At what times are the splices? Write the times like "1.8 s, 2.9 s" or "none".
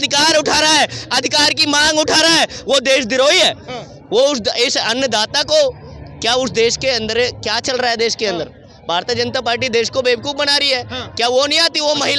none